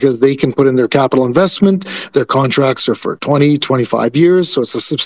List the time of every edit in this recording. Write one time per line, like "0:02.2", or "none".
none

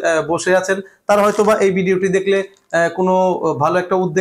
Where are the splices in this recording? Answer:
none

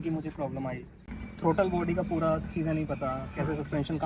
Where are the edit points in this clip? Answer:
0:01.1

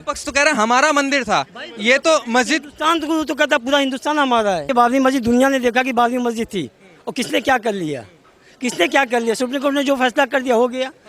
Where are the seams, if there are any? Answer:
0:04.6

